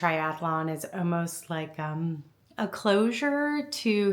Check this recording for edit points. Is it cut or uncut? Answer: cut